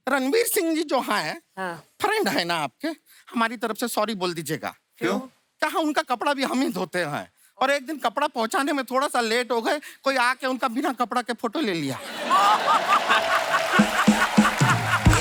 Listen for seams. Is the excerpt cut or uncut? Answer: uncut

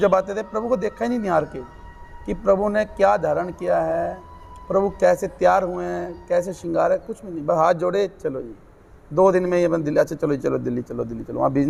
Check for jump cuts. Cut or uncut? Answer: uncut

